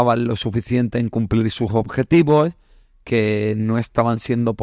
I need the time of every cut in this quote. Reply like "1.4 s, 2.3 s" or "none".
none